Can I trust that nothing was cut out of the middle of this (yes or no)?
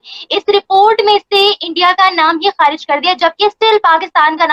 yes